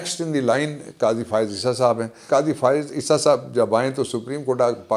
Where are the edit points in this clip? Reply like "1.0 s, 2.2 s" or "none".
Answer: 2.2 s